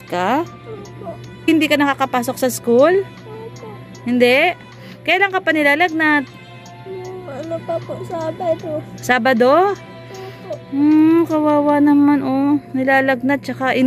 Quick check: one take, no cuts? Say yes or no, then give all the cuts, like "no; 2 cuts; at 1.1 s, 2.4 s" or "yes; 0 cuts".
no; 1 cut; at 1.5 s